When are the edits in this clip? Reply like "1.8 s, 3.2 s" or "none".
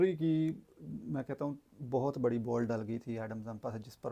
none

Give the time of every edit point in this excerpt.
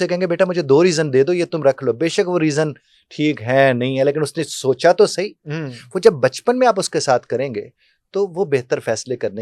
none

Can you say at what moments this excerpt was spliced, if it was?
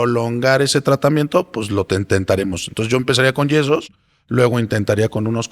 none

